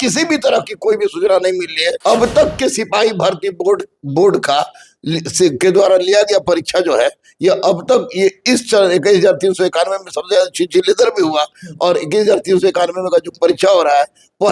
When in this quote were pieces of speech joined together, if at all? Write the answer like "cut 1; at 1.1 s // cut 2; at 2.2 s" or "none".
cut 1; at 2.0 s